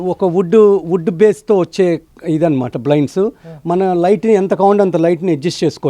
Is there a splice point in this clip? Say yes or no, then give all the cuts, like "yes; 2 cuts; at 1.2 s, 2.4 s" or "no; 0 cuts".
no; 0 cuts